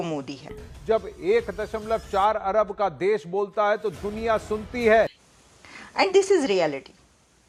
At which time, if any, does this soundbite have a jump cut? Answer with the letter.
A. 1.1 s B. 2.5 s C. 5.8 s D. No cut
D